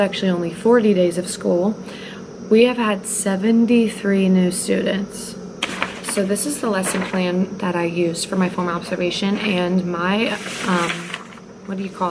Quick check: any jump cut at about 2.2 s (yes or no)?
no